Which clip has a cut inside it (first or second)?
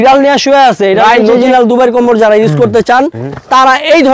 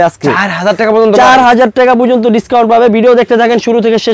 first